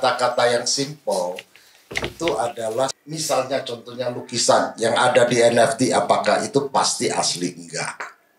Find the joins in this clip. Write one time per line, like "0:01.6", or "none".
0:03.0